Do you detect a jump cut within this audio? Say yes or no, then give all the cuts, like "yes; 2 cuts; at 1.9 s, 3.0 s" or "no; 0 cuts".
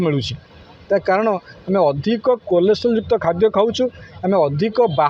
no; 0 cuts